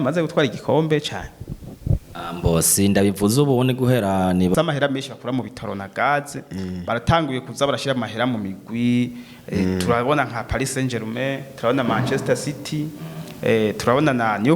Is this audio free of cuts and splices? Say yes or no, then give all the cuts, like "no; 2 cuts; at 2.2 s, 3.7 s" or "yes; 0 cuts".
no; 1 cut; at 4.5 s